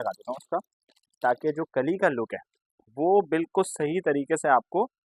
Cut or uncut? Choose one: uncut